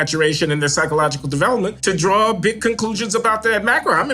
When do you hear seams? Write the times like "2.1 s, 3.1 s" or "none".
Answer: 1.8 s